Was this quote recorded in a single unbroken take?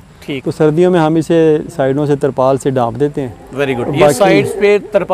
yes; 0 cuts

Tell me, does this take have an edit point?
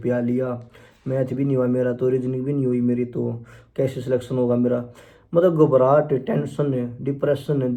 no; 0 cuts

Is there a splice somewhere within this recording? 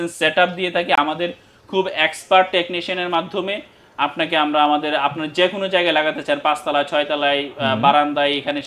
no; 0 cuts

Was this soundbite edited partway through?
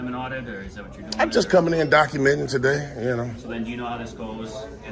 no; 0 cuts

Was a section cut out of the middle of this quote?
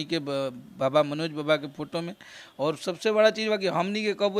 no; 0 cuts

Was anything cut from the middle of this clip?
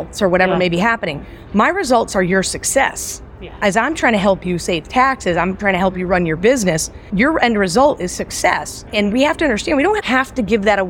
yes; 2 cuts; at 7.1 s, 8.7 s

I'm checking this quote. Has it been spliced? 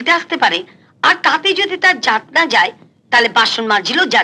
no; 0 cuts

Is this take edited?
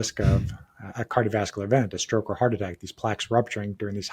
no; 0 cuts

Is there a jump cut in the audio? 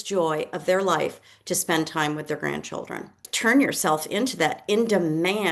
yes; 1 cut; at 3.2 s

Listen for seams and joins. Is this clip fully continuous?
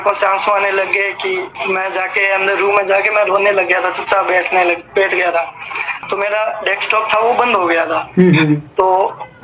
no; 2 cuts; at 1.5 s, 6.0 s

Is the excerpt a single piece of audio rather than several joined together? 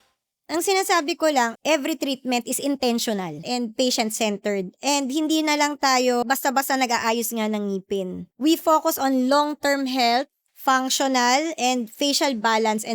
no; 5 cuts; at 1.6 s, 3.4 s, 6.2 s, 8.2 s, 10.4 s

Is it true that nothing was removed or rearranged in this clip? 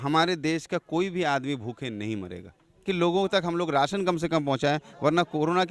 no; 1 cut; at 2.8 s

